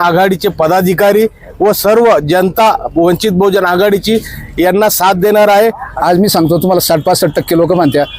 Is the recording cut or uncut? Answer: cut